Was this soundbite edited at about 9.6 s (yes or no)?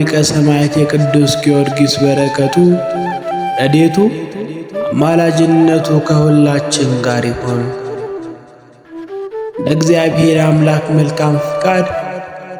yes